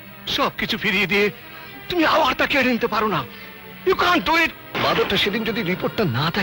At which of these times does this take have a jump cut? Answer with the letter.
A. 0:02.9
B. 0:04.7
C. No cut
B